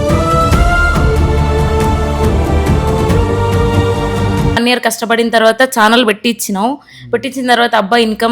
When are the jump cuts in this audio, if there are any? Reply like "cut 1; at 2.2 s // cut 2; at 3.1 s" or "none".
cut 1; at 4.6 s